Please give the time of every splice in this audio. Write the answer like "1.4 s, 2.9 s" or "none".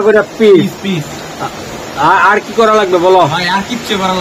none

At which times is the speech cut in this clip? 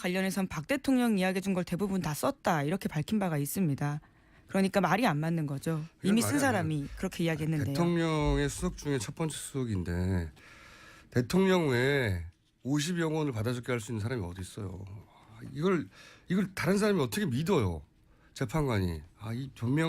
3.7 s

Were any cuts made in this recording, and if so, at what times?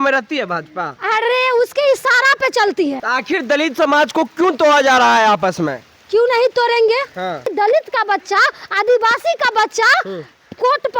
3.0 s, 7.5 s

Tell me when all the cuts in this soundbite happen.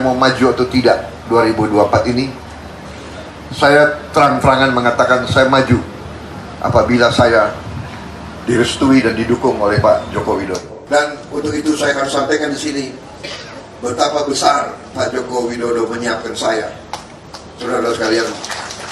none

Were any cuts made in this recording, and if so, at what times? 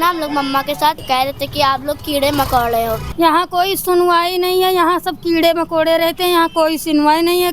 1.0 s, 3.0 s

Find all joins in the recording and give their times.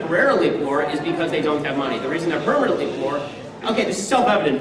1.5 s

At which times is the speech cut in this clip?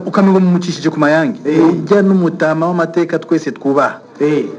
none

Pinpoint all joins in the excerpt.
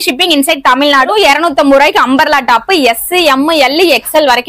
1.1 s

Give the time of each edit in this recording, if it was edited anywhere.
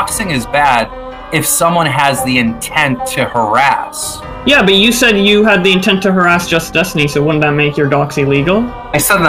none

